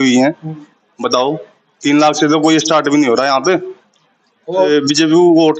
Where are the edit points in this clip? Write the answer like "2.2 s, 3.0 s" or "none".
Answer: 4.7 s